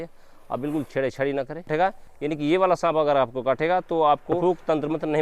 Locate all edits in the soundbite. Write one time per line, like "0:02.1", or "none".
0:01.7
0:04.4